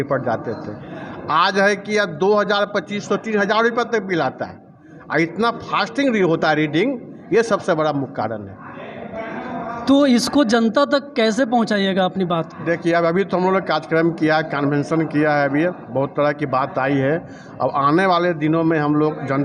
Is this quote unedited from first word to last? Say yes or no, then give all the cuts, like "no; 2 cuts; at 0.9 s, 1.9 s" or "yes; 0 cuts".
yes; 0 cuts